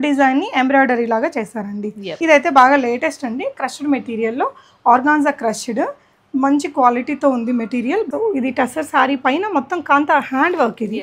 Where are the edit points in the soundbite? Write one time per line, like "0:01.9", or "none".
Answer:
0:02.2
0:08.1